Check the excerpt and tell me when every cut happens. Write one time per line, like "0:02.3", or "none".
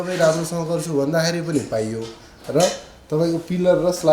none